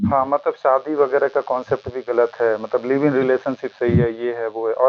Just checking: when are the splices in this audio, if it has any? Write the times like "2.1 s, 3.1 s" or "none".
none